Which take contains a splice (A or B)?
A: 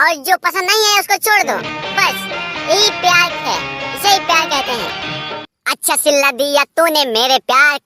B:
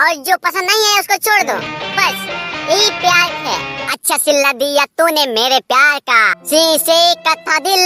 B